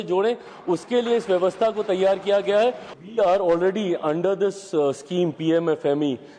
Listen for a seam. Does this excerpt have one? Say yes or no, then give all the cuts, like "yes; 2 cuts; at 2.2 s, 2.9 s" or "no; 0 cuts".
yes; 1 cut; at 2.9 s